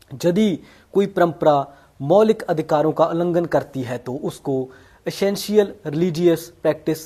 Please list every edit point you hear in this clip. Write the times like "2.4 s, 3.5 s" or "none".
none